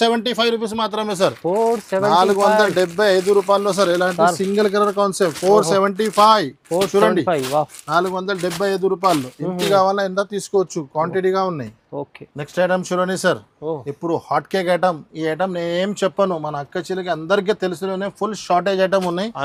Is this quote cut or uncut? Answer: uncut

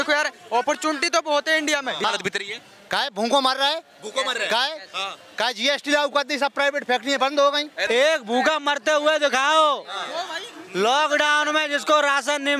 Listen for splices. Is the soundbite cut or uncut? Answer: cut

